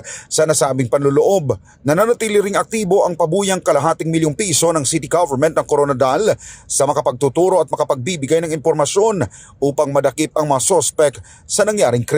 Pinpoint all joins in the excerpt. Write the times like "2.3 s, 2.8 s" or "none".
none